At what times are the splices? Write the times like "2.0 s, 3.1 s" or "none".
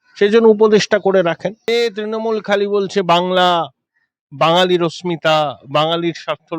1.7 s